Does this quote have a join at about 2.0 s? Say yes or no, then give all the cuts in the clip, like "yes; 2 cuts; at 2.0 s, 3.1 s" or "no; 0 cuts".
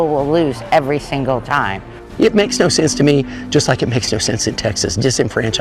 yes; 1 cut; at 2.0 s